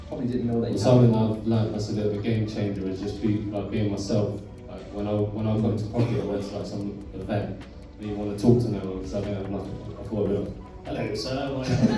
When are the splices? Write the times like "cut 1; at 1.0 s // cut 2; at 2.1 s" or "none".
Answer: none

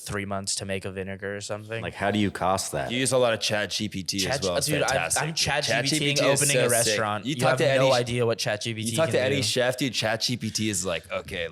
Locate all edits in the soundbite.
cut 1; at 1.9 s // cut 2; at 3.0 s

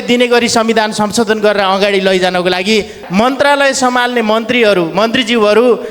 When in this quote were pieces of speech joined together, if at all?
cut 1; at 3.0 s

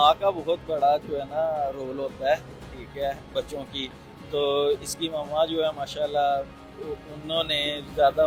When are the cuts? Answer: none

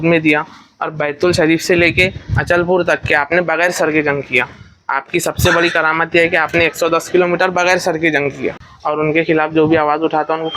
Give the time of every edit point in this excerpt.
cut 1; at 8.7 s

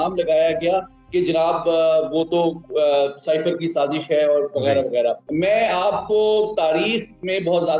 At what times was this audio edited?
cut 1; at 5.2 s

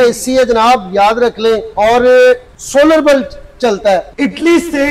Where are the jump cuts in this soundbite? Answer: cut 1; at 1.7 s // cut 2; at 2.5 s // cut 3; at 4.1 s

